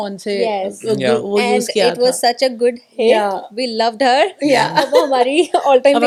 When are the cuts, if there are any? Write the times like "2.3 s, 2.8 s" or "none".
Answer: none